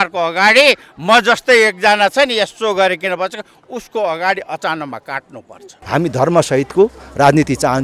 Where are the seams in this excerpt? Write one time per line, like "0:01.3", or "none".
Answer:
0:05.8

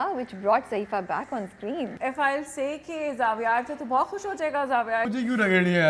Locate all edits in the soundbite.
0:01.9
0:05.1

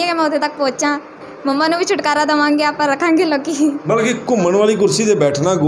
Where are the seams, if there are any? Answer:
0:01.3

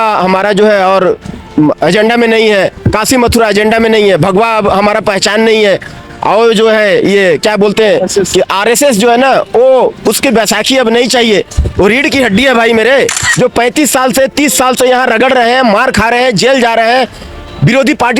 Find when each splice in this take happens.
0:13.3

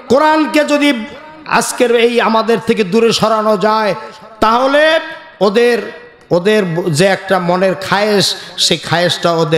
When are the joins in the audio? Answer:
none

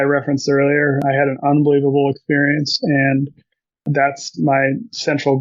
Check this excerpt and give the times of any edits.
0:01.0
0:03.9

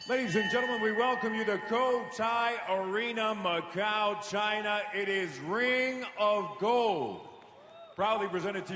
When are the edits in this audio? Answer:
none

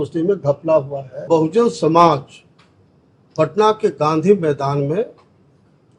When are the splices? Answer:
0:01.3

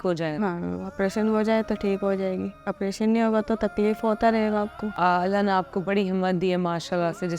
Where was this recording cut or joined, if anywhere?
0:04.8

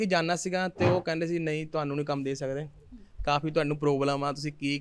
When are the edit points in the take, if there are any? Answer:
none

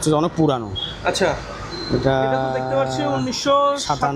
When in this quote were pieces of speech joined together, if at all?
none

